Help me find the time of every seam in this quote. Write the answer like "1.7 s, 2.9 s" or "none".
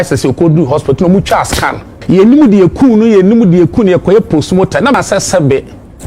2.0 s, 4.9 s